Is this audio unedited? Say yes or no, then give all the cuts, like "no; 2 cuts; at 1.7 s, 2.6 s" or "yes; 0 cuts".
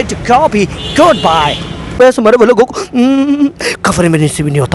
no; 1 cut; at 1.9 s